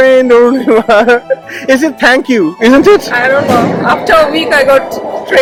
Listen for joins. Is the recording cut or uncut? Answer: uncut